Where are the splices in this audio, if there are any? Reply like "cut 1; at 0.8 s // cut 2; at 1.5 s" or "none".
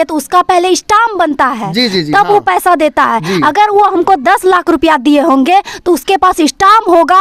none